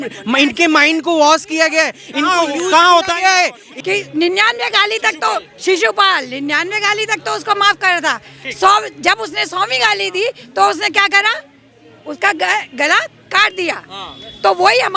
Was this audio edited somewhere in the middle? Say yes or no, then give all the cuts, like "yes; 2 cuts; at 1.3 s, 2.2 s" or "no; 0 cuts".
yes; 1 cut; at 3.7 s